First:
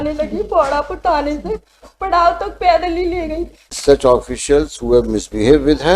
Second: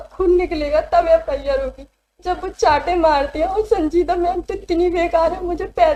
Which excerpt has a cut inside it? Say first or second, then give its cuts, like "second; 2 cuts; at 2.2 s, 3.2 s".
first; 1 cut; at 3.8 s